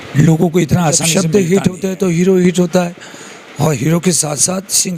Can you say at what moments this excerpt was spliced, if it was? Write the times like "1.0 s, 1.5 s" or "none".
1.1 s